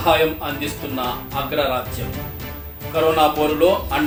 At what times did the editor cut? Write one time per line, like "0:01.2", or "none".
none